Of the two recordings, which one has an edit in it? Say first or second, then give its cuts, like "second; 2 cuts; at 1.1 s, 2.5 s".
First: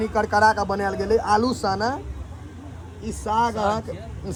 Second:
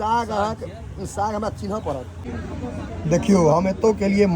second; 1 cut; at 2.2 s